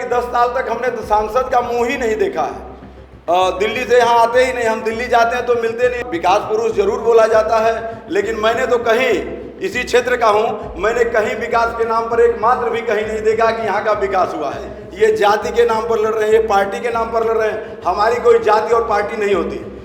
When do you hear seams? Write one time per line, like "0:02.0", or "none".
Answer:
0:06.0
0:14.8